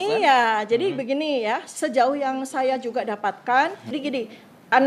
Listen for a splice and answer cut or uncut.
cut